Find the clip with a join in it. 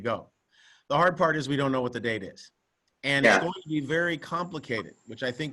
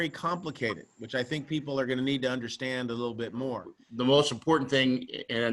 second; 1 cut; at 3.8 s

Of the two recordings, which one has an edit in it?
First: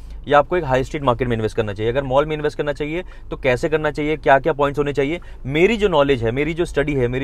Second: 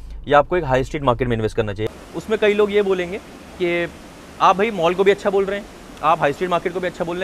second; 1 cut; at 1.9 s

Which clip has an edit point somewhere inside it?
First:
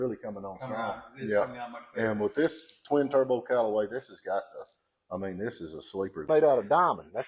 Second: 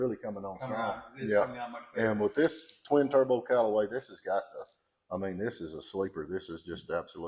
first; 1 cut; at 6.3 s

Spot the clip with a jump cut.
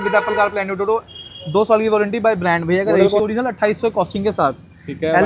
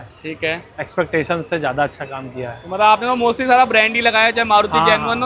first; 1 cut; at 3.2 s

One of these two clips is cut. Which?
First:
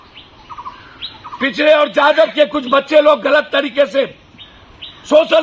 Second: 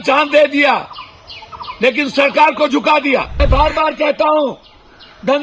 second; 1 cut; at 3.3 s

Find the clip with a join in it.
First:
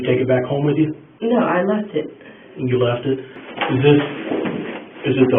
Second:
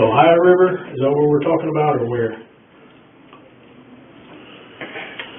first; 1 cut; at 3.4 s

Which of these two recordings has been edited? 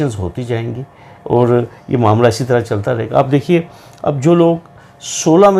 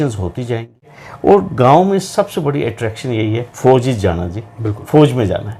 second; 1 cut; at 1.0 s

